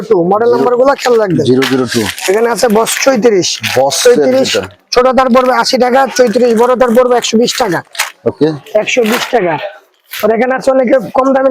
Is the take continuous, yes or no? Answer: yes